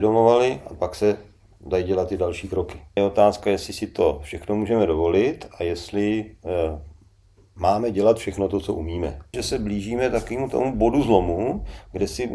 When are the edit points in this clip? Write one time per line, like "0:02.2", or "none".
0:03.0
0:09.3